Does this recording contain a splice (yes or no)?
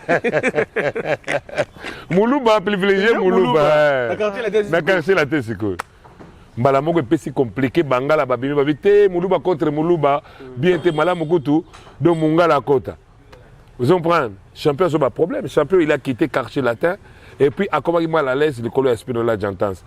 no